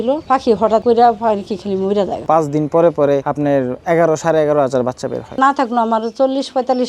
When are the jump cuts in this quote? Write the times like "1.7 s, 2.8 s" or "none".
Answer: 2.2 s, 5.4 s